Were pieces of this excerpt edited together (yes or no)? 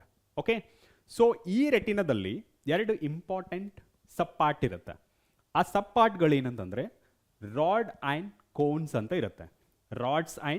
no